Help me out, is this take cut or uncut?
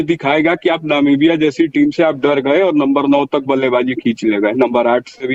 uncut